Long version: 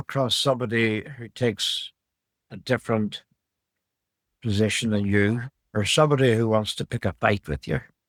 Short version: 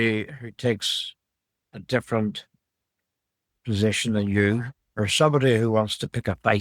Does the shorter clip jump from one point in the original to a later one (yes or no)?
no